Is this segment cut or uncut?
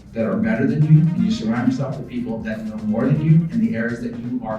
cut